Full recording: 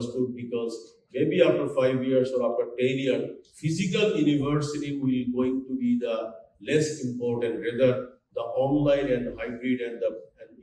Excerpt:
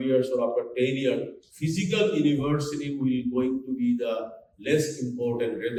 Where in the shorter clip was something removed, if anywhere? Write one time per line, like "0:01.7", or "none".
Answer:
none